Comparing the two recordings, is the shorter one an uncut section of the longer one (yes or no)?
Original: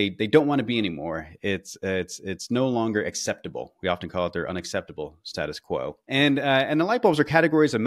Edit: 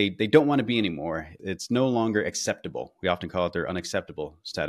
no